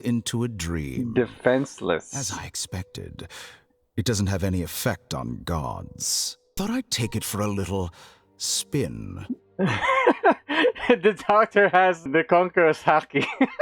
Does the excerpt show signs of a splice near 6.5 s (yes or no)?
yes